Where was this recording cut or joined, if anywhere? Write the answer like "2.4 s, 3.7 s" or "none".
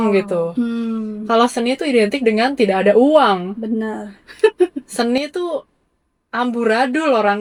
none